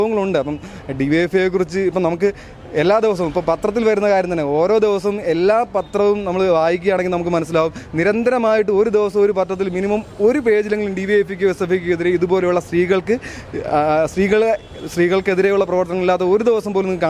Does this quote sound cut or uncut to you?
uncut